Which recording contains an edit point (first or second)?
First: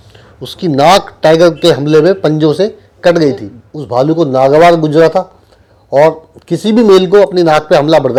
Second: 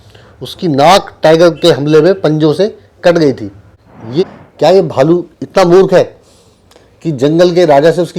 second